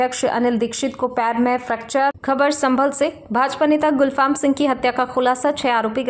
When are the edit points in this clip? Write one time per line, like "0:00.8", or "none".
0:02.2

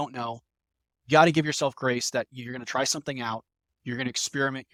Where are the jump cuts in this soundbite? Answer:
none

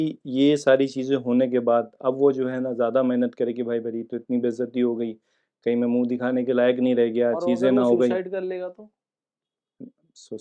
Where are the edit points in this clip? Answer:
none

